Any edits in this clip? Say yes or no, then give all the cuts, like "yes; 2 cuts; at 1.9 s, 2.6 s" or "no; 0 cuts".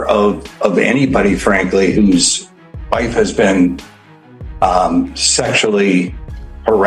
no; 0 cuts